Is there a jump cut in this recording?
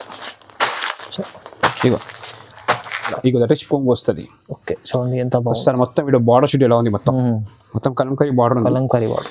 yes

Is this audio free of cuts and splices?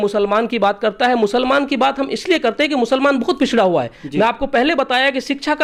yes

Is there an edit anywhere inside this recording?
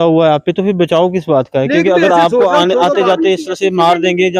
no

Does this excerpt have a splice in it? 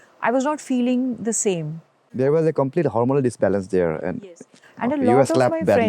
yes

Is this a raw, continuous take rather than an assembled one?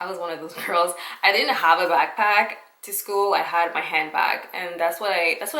yes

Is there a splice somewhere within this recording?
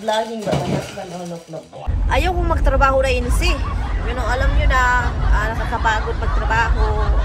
yes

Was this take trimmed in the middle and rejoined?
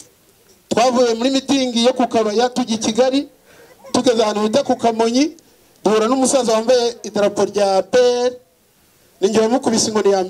no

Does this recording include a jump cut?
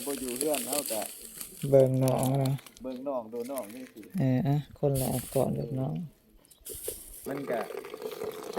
yes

